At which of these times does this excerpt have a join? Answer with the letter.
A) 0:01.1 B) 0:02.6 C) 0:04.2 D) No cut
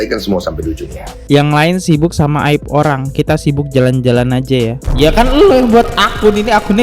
A